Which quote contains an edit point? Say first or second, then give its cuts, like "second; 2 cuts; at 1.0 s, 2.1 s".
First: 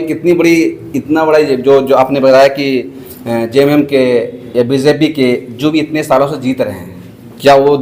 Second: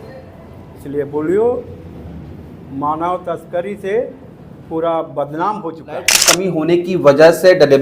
second; 1 cut; at 6.4 s